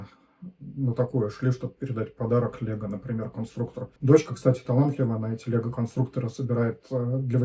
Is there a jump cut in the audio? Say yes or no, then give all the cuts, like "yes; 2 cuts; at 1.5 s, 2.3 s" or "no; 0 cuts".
yes; 1 cut; at 3.9 s